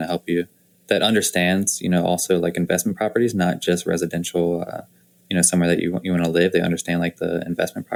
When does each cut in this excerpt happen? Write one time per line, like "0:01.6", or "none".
none